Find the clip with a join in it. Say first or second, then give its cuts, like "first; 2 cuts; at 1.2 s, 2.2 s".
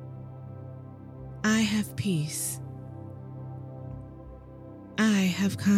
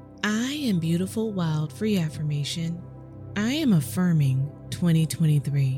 first; 3 cuts; at 1.4 s, 2.3 s, 4.9 s